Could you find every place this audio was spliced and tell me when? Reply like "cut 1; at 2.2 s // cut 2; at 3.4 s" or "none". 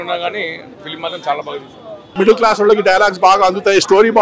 cut 1; at 2.1 s

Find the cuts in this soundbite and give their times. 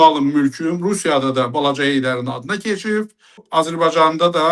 cut 1; at 3.5 s

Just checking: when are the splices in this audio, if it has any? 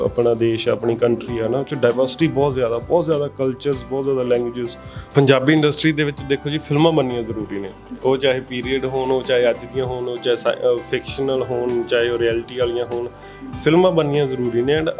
cut 1; at 5.1 s

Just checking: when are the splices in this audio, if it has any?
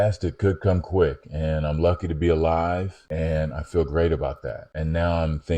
cut 1; at 2.9 s // cut 2; at 4.6 s

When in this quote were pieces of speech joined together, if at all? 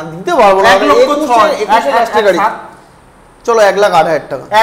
none

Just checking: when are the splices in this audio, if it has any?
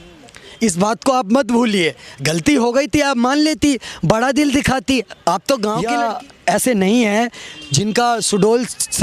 cut 1; at 5.8 s

